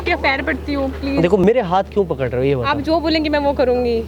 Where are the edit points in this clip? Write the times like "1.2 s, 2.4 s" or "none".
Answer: 1.4 s